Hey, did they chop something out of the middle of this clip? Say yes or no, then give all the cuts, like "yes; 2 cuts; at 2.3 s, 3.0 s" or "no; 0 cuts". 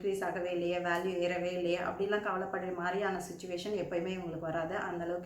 no; 0 cuts